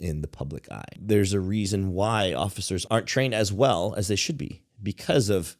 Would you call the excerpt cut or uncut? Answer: cut